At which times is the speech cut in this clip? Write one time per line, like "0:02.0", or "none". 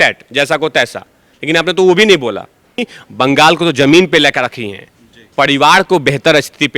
0:03.0